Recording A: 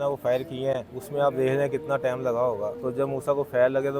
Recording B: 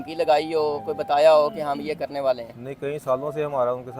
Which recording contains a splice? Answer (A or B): A